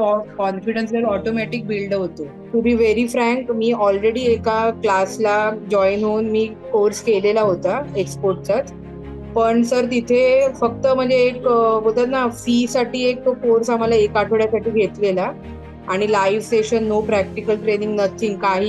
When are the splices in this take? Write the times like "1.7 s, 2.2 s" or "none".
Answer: 2.5 s